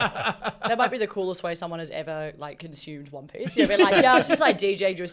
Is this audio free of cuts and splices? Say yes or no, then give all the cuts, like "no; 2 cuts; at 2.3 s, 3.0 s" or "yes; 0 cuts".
yes; 0 cuts